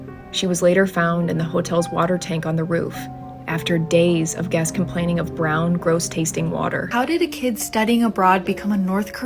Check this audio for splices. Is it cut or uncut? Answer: cut